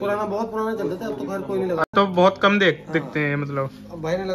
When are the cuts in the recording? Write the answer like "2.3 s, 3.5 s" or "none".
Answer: none